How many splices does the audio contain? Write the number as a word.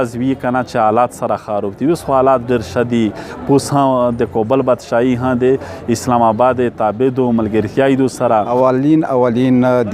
one